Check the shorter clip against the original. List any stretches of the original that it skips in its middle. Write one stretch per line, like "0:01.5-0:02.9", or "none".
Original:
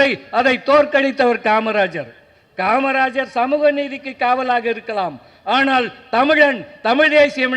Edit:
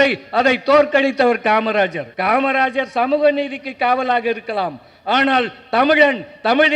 0:02.0-0:02.4